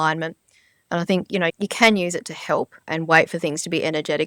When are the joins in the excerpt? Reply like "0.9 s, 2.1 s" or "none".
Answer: 1.5 s, 2.9 s